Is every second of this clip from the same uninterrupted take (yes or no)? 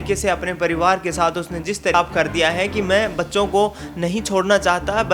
no